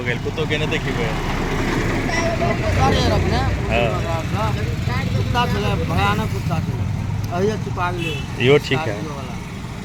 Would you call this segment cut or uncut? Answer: uncut